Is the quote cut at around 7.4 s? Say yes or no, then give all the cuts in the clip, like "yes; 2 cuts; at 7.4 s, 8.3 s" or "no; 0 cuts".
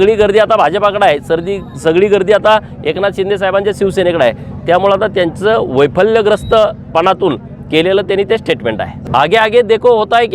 no; 1 cut; at 9.0 s